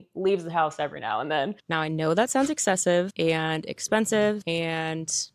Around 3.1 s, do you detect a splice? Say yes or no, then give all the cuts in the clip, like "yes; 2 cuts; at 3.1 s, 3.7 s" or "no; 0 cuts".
yes; 3 cuts; at 1.6 s, 3.1 s, 4.4 s